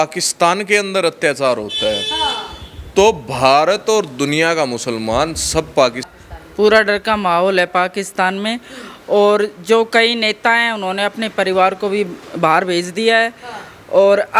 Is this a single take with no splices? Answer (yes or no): no